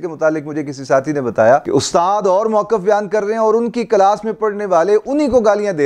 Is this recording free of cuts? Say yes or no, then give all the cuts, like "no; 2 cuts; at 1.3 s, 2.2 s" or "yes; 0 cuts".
yes; 0 cuts